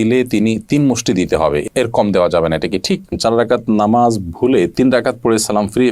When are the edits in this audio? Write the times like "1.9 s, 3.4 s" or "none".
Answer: 3.1 s